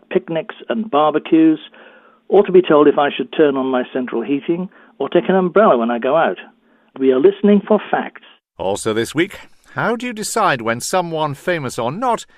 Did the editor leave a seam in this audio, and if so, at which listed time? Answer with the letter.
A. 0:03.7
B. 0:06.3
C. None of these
B